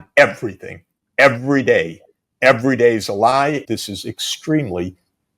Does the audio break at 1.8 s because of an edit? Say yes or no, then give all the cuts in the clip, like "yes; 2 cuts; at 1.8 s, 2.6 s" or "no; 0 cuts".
no; 1 cut; at 3.6 s